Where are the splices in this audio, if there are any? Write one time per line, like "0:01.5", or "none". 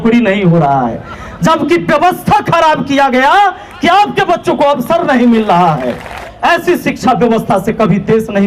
0:06.2